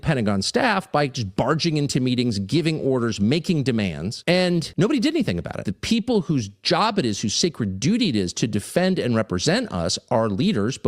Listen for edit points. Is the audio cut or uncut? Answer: cut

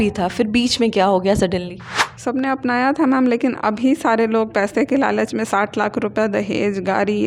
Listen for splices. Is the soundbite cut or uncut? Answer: uncut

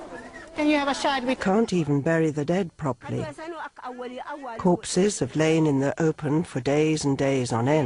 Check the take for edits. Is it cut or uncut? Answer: uncut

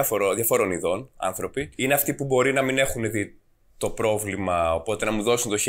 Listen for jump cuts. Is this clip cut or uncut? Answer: cut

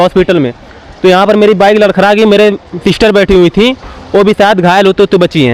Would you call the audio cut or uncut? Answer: uncut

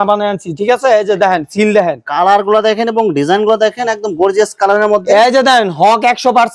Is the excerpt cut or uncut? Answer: uncut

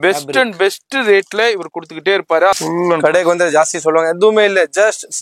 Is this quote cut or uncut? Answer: cut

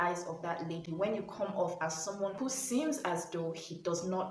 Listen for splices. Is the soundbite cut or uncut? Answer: uncut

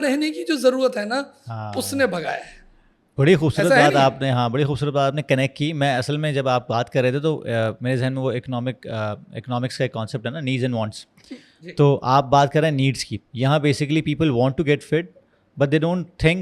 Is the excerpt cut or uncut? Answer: uncut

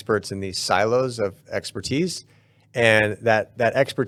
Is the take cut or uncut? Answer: uncut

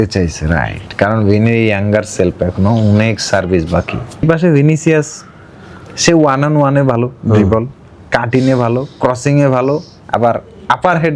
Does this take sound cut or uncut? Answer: cut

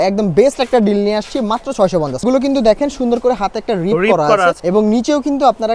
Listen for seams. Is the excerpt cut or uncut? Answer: cut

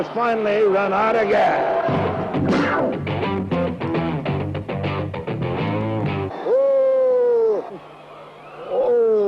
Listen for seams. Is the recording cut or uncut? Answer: uncut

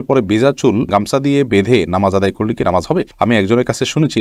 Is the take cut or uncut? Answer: uncut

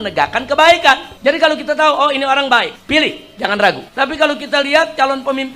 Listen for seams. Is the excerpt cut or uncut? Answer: cut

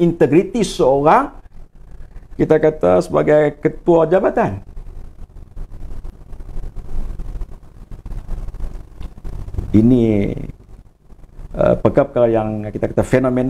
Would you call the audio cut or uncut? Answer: uncut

